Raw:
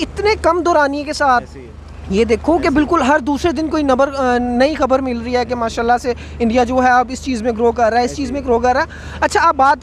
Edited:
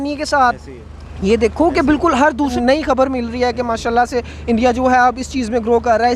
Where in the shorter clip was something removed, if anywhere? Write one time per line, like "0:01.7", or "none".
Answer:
0:02.5